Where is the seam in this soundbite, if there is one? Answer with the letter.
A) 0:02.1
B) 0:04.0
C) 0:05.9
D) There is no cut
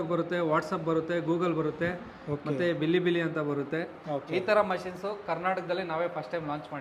B